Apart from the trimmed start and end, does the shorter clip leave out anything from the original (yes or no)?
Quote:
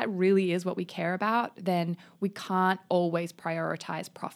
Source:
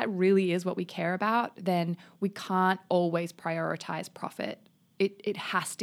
no